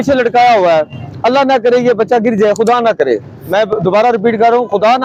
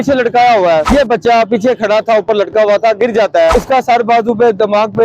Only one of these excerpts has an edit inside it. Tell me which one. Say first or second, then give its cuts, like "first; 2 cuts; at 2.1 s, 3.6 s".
second; 2 cuts; at 0.8 s, 3.5 s